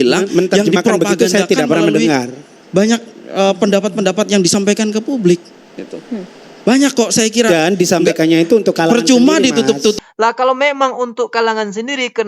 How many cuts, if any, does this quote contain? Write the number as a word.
one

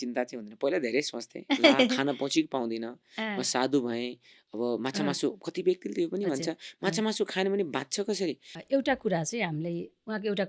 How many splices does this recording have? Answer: one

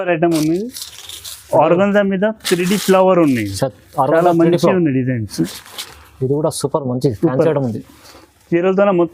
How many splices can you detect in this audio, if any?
zero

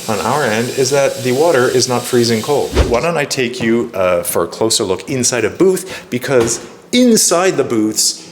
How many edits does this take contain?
one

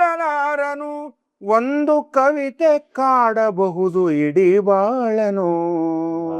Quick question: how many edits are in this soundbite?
zero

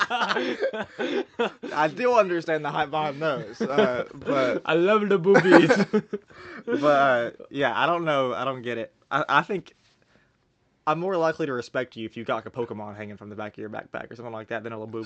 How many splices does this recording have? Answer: zero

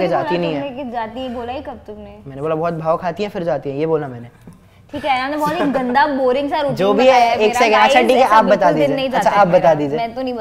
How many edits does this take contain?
zero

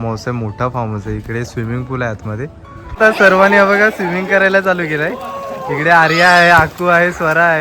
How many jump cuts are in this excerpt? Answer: one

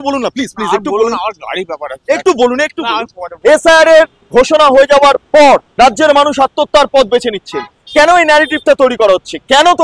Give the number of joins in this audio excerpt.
three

